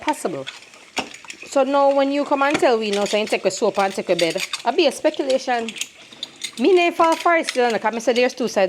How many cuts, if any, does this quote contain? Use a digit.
0